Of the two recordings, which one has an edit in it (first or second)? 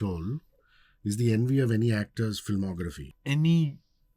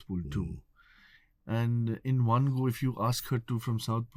first